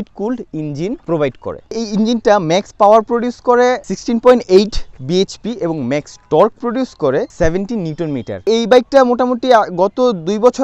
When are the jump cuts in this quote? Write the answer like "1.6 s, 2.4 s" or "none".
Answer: none